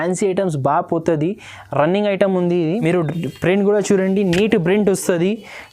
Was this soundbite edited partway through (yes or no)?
yes